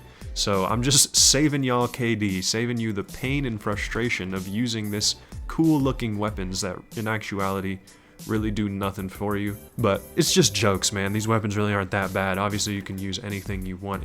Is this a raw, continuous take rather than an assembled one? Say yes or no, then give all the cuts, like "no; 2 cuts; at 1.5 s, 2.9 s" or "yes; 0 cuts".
no; 1 cut; at 9.7 s